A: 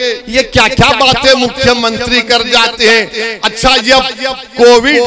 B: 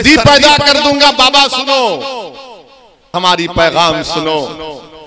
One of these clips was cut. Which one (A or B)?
B